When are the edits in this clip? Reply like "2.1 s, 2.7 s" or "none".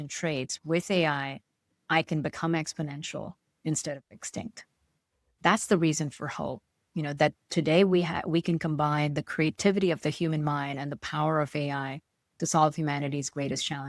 5.2 s